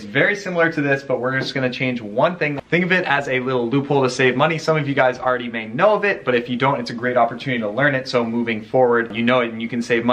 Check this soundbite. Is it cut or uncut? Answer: cut